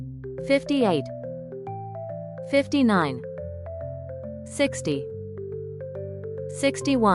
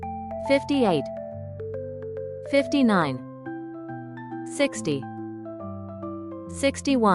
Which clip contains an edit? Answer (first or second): second